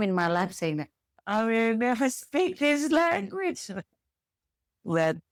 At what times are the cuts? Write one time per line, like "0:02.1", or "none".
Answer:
none